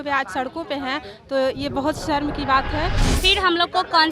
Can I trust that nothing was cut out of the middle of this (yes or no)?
no